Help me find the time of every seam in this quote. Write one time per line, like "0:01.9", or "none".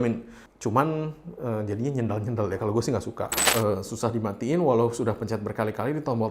0:03.4

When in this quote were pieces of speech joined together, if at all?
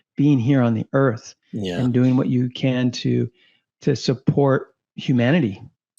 none

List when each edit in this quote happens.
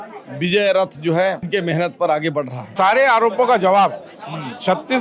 0:01.4
0:02.7

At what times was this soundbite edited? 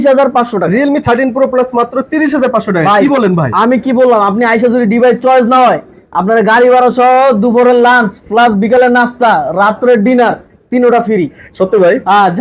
none

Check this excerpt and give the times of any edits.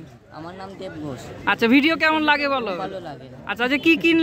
none

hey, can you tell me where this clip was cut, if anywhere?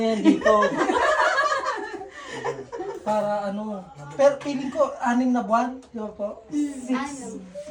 none

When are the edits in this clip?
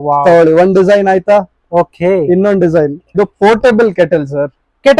0:03.1

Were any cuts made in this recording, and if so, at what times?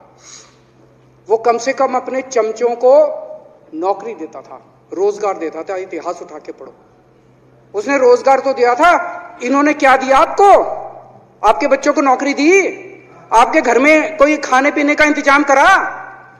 none

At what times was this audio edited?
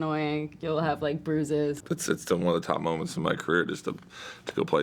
0:01.8

